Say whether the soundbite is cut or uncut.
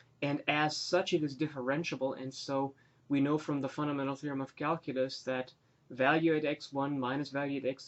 cut